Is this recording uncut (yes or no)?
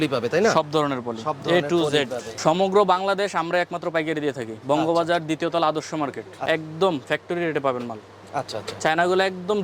no